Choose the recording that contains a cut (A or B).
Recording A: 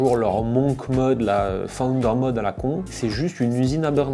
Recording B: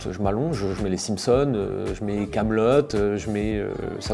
A